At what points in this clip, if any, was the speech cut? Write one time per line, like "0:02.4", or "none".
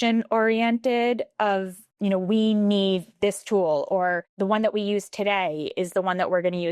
0:01.8
0:04.3